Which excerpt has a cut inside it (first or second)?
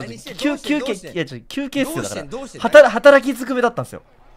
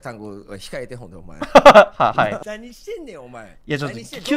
second